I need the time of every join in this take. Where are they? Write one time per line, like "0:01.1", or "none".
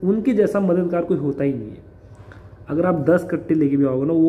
none